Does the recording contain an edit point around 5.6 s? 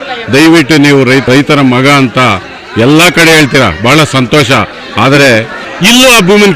yes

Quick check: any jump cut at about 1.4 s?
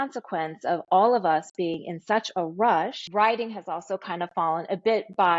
no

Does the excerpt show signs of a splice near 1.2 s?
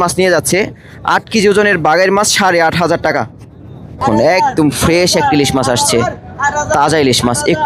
no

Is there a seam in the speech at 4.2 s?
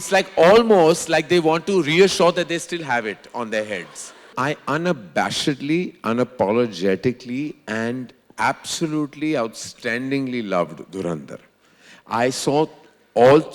yes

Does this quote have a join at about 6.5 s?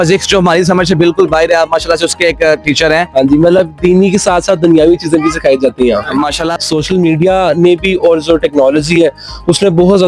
yes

